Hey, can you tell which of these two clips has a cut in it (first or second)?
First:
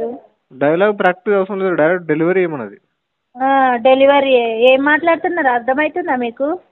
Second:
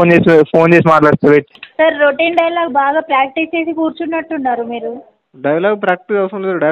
second